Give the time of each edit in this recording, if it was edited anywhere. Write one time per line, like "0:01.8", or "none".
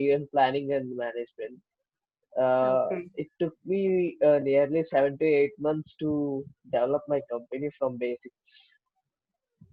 none